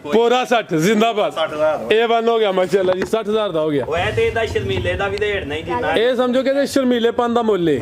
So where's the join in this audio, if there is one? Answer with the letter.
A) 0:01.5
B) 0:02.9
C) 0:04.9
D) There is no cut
D